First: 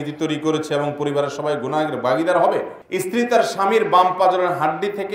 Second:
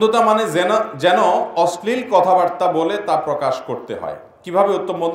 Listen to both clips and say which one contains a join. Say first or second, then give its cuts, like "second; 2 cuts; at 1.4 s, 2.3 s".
first; 1 cut; at 2.8 s